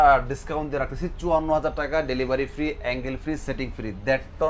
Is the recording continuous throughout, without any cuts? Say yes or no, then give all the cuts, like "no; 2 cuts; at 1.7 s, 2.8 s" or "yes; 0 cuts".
yes; 0 cuts